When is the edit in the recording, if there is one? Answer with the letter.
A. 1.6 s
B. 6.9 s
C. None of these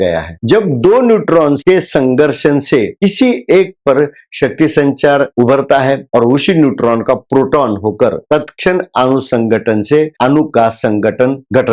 A